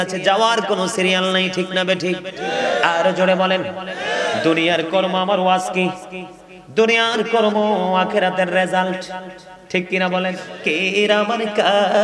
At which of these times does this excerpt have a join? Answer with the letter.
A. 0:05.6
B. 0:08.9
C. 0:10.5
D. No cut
C